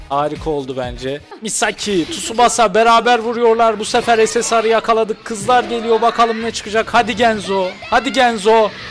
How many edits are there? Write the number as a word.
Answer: one